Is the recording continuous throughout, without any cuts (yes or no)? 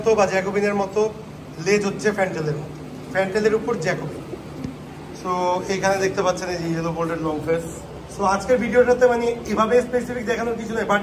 yes